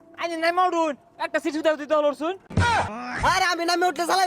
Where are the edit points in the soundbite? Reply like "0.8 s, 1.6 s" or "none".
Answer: 2.7 s

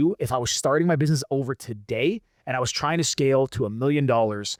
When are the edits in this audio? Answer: none

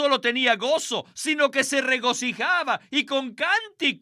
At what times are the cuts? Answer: none

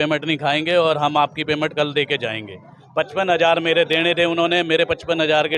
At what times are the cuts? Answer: none

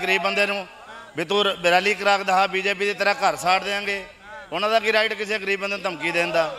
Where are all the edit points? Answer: none

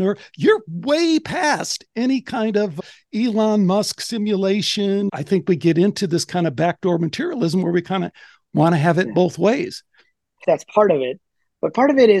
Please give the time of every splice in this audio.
5.1 s, 10.4 s

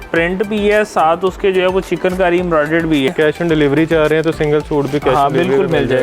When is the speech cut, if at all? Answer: 3.1 s

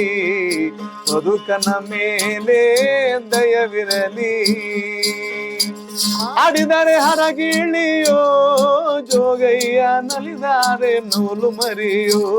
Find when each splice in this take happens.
5.9 s

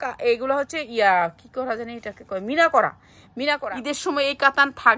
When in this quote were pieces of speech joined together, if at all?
3.6 s

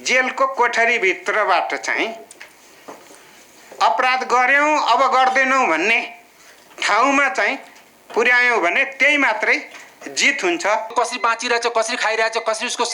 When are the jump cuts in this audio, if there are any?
10.9 s

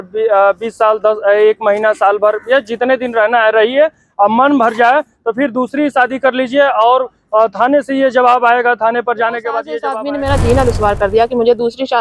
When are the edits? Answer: 9.8 s

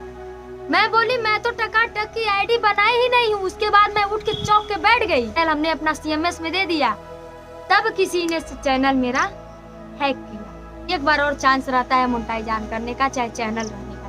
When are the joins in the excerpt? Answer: 5.4 s, 10.9 s

